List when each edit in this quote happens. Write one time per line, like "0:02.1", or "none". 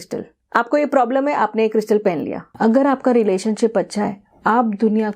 0:02.5